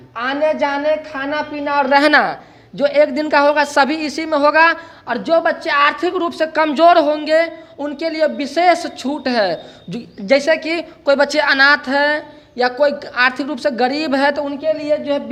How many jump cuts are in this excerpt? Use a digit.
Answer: 0